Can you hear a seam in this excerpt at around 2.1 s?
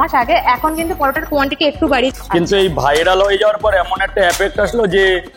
yes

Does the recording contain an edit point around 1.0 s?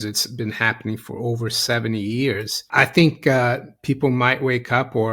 no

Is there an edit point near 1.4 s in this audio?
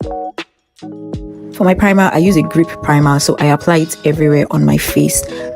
yes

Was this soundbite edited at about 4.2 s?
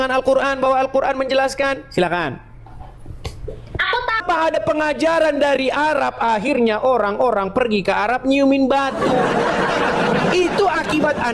yes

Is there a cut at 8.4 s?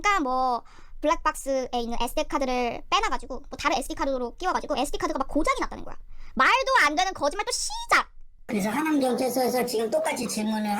yes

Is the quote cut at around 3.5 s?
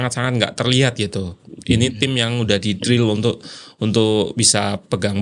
no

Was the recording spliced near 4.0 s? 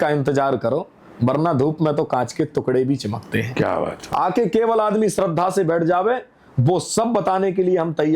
yes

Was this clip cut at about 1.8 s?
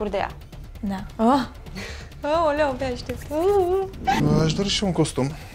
no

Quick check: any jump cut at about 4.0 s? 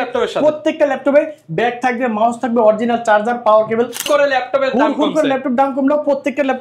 yes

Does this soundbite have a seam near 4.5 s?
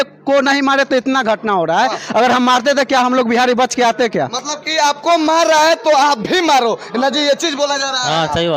no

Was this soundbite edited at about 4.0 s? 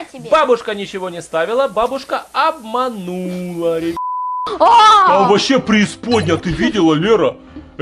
yes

